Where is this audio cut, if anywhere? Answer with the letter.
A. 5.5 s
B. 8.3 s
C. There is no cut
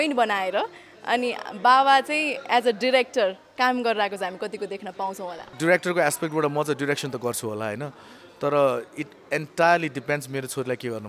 A